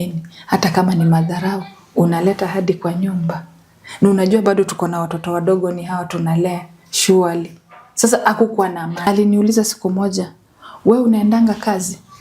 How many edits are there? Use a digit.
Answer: 1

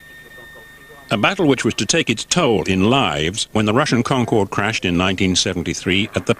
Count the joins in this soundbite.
1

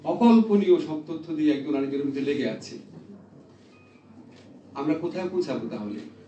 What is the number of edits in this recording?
0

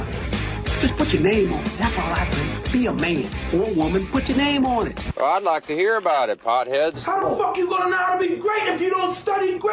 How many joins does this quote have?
0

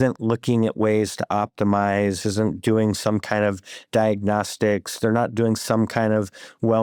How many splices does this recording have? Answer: 0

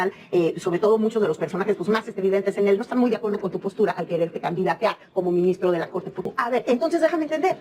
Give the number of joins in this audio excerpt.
1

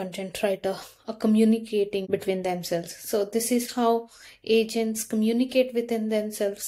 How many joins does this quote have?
1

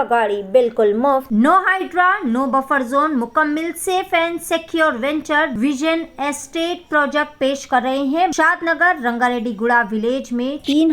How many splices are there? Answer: 2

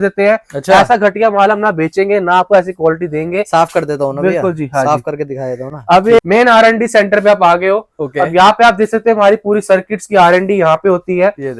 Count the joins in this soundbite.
0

